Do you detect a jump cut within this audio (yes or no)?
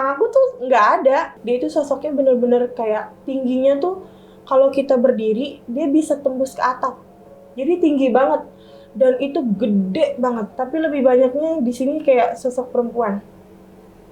yes